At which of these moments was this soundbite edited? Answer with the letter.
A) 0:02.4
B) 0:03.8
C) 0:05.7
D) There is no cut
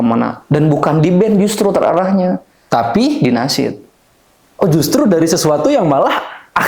D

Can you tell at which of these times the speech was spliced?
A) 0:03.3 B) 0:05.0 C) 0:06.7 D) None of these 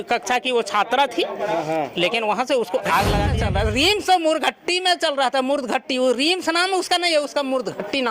A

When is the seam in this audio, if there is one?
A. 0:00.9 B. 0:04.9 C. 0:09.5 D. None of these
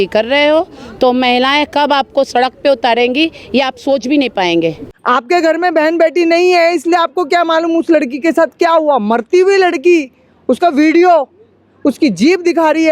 B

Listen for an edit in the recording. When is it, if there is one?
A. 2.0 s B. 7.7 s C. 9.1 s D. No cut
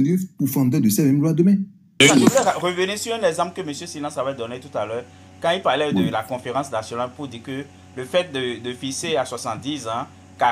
A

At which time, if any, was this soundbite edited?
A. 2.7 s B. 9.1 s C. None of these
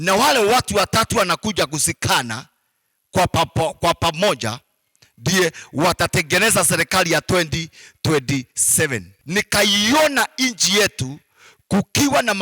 B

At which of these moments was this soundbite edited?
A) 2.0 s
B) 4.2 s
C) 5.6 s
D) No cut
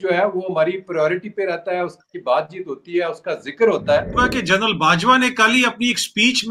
B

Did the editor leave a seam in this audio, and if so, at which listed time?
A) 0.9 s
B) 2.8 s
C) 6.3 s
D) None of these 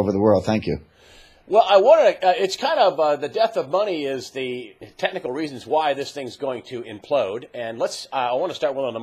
B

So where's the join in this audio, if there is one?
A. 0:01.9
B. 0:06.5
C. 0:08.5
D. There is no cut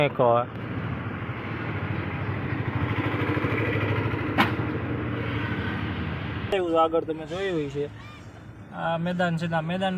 B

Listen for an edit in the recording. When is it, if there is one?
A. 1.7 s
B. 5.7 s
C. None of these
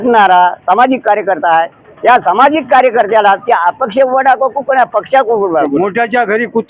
B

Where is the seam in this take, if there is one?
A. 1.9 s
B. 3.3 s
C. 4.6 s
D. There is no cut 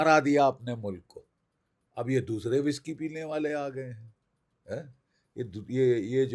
D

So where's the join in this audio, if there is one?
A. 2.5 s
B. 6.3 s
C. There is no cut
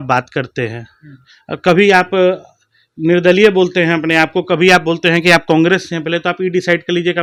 C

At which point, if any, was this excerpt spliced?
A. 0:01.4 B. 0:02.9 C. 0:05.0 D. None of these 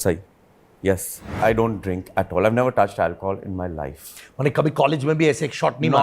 A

